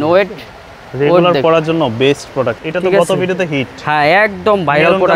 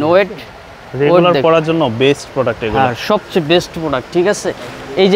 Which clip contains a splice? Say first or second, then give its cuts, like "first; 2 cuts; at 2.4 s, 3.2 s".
first; 1 cut; at 2.6 s